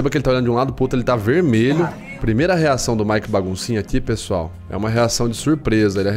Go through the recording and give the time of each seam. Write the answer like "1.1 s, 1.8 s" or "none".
2.1 s